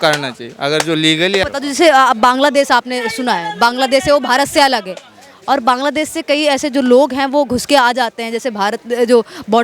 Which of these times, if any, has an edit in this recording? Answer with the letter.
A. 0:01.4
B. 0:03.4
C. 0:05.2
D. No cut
A